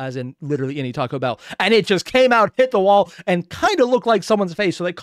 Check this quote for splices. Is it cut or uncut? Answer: uncut